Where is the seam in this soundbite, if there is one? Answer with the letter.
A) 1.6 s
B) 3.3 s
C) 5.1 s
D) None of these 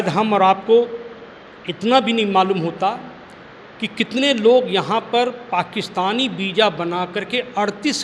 D